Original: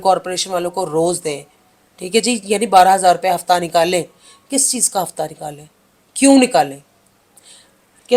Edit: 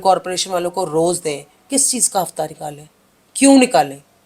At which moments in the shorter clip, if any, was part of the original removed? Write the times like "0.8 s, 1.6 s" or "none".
1.5 s